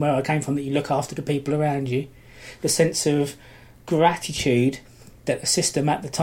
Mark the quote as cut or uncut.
uncut